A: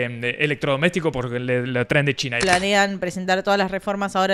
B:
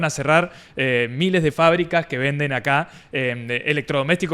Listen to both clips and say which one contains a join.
A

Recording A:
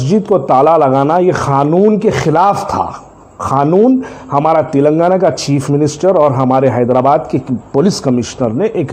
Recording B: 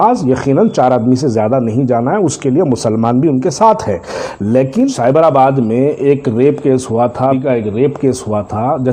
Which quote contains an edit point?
B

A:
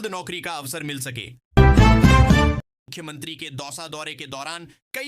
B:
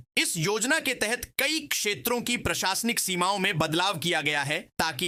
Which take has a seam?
A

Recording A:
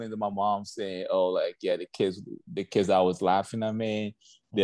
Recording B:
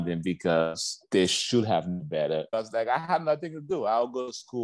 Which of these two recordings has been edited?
B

